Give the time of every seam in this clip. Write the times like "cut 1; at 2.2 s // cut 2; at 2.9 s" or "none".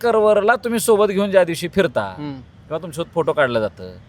none